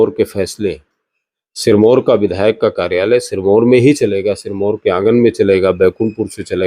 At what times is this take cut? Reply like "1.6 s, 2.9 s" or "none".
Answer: none